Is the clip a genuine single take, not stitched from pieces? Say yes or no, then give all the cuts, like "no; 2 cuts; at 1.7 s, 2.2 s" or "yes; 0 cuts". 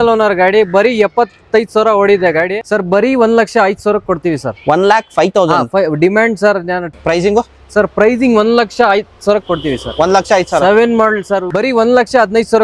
no; 3 cuts; at 2.6 s, 6.8 s, 11.4 s